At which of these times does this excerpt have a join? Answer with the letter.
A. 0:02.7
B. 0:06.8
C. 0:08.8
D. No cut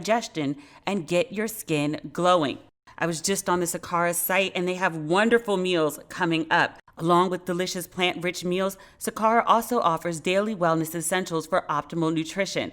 A